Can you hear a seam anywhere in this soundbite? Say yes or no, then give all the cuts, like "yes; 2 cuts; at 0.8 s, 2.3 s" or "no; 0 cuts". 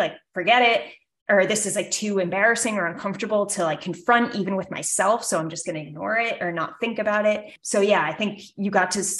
yes; 1 cut; at 7.5 s